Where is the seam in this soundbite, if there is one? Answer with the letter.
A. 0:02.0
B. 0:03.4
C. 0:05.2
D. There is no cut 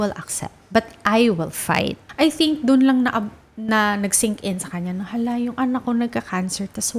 A